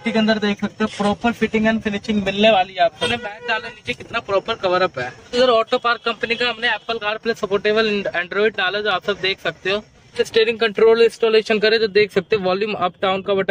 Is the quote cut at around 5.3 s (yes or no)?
yes